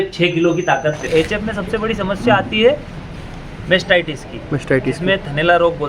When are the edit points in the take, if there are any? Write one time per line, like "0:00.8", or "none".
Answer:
0:01.0